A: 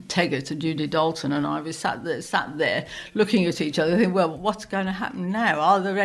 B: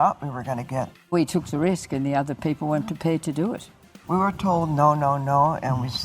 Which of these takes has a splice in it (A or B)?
B